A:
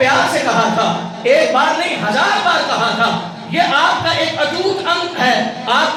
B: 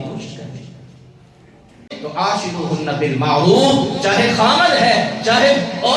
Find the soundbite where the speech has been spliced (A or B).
B